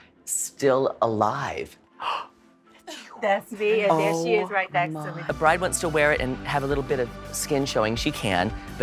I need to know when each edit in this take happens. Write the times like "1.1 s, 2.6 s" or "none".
5.2 s